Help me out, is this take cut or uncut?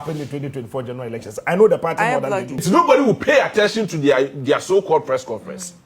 cut